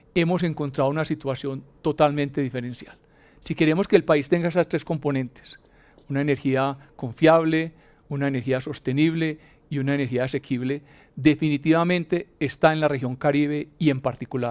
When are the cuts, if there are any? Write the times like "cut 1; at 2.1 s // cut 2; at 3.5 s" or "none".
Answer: none